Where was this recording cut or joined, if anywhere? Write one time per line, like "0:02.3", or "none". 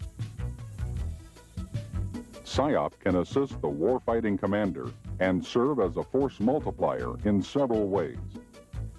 0:07.1